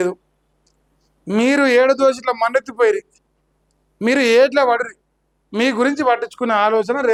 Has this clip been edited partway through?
no; 0 cuts

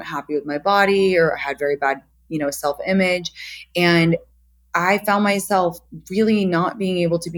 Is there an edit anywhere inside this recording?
no; 0 cuts

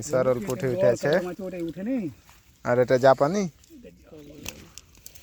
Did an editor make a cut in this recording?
no; 0 cuts

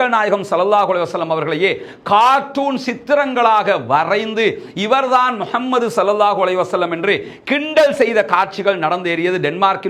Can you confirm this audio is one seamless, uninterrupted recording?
yes; 0 cuts

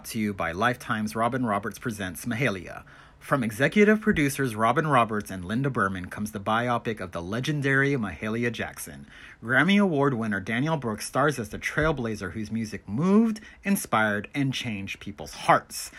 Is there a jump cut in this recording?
no; 0 cuts

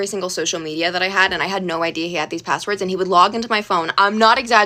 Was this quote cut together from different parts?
no; 0 cuts

